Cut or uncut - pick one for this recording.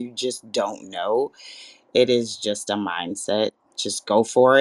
uncut